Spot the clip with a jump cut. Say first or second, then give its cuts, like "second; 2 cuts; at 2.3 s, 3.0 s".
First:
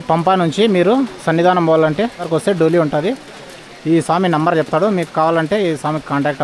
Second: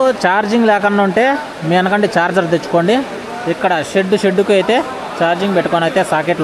first; 1 cut; at 2.2 s